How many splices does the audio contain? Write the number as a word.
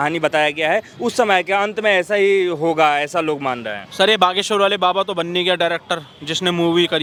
zero